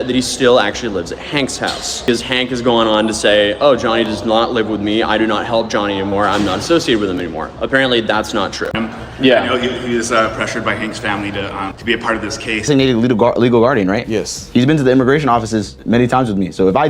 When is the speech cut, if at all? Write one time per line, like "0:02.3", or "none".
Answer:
0:02.0
0:08.7
0:12.7